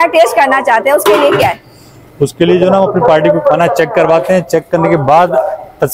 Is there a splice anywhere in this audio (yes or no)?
no